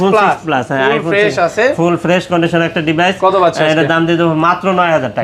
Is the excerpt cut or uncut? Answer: uncut